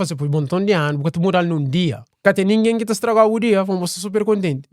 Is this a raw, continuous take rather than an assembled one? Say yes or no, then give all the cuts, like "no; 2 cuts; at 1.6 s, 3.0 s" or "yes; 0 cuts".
no; 1 cut; at 2.1 s